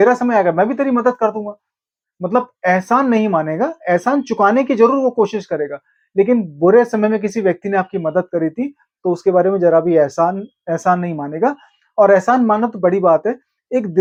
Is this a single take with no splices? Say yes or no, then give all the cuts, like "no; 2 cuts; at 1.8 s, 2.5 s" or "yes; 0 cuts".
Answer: yes; 0 cuts